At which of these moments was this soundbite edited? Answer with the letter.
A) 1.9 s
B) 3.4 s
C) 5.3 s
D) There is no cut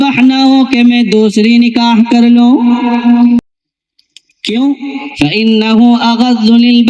B